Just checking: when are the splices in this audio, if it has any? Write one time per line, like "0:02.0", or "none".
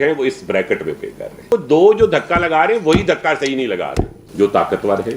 0:01.5
0:04.2